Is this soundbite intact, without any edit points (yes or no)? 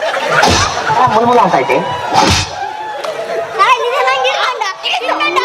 yes